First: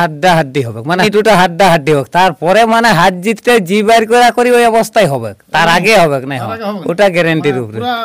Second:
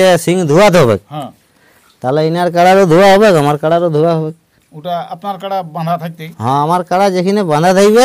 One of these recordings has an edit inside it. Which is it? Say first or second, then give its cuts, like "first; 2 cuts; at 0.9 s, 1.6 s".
first; 1 cut; at 1.0 s